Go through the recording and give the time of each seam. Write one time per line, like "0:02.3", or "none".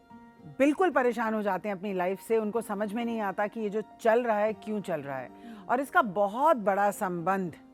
none